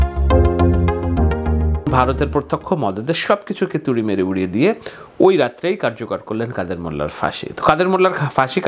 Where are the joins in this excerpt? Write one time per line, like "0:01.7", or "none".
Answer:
0:01.9